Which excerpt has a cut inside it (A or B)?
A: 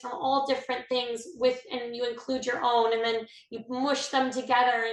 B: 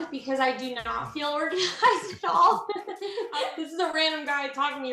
B